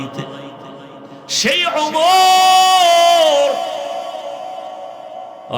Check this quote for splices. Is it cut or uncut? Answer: cut